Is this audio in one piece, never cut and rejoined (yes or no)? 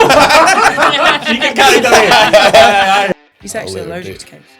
no